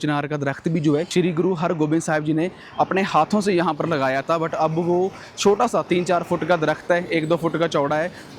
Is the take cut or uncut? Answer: cut